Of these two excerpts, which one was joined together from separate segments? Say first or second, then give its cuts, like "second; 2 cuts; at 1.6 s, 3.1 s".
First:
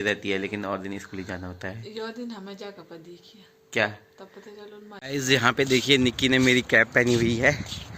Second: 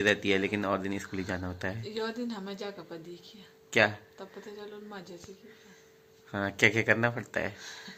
first; 1 cut; at 5.0 s